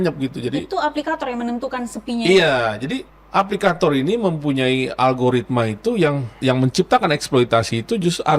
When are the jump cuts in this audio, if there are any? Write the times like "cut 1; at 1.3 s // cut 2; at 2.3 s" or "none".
cut 1; at 3.1 s // cut 2; at 6.4 s